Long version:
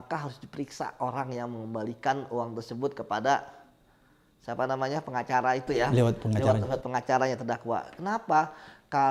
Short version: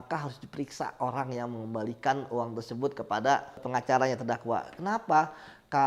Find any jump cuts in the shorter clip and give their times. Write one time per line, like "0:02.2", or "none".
0:03.6